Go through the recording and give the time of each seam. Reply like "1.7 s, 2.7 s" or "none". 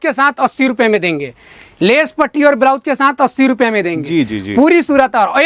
none